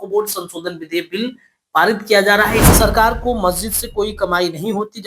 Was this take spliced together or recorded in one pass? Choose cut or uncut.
cut